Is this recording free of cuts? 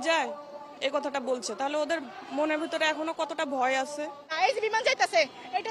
no; 1 cut; at 4.3 s

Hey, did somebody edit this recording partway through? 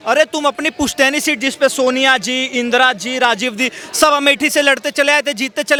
no; 0 cuts

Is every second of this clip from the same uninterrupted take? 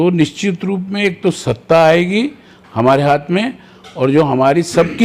yes; 0 cuts

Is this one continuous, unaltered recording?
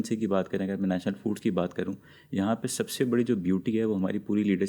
yes; 0 cuts

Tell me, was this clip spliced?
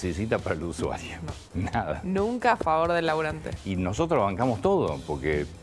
yes; 1 cut; at 3.5 s

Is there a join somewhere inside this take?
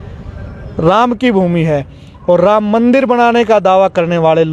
no; 0 cuts

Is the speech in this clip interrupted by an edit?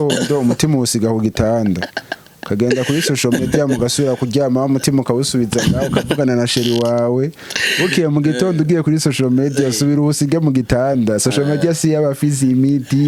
no; 0 cuts

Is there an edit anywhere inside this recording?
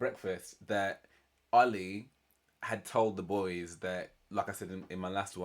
no; 0 cuts

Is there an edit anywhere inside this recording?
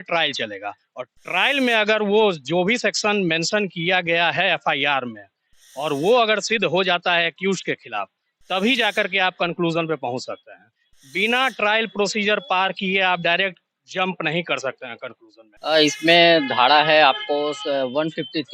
yes; 1 cut; at 15.6 s

